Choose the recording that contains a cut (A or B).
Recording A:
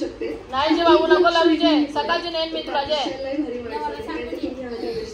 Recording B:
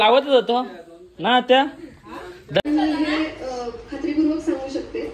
B